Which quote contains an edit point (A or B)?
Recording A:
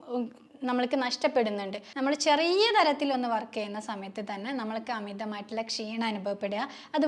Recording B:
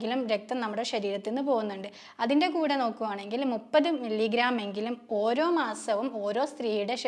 A